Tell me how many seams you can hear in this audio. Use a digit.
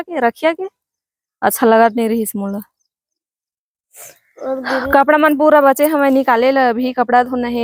0